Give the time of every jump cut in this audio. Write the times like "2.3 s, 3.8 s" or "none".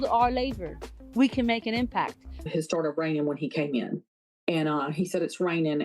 2.4 s